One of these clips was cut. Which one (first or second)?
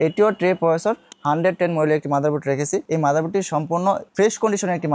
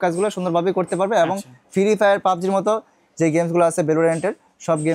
first